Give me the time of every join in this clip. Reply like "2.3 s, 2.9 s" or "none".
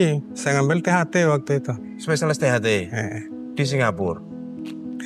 none